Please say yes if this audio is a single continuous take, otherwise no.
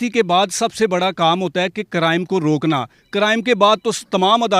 yes